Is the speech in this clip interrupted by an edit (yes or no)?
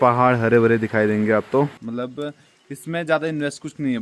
yes